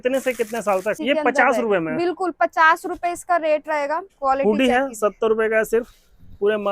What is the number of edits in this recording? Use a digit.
2